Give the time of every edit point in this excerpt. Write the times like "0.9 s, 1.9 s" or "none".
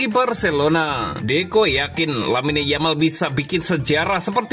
1.1 s